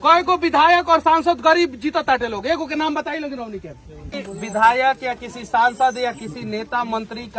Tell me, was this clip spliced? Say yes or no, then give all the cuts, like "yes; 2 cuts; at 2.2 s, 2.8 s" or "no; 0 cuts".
yes; 1 cut; at 4.0 s